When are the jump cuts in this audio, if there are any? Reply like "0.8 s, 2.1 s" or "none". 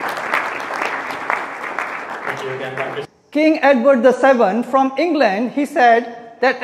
3.0 s